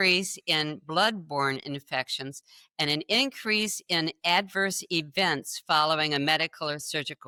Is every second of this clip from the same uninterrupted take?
yes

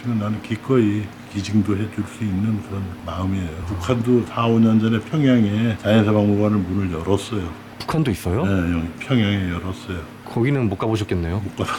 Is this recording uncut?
yes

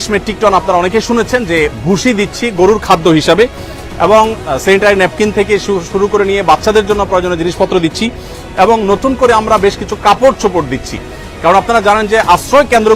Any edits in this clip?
no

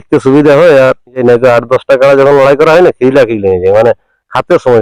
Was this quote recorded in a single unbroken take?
no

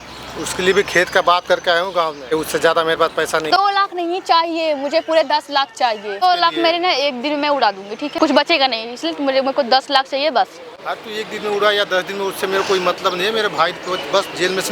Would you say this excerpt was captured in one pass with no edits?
no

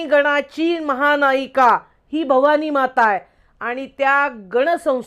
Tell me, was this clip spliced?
no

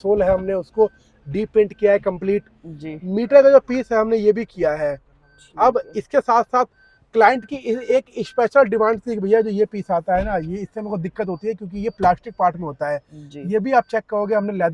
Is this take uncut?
yes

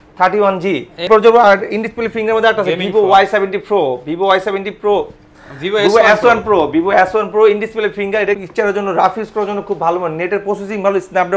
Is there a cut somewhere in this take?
yes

